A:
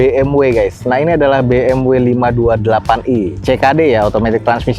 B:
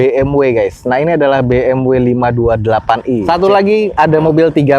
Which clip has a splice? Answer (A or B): B